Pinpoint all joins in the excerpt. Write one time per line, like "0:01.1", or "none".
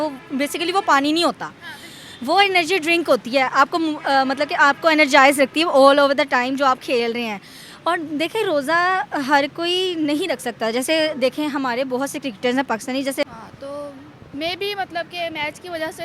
0:13.3